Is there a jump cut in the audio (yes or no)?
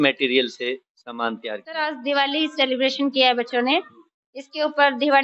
yes